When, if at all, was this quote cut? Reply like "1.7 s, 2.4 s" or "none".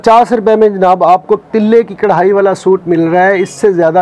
none